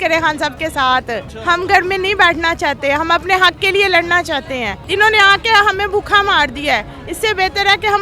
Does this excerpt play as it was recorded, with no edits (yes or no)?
yes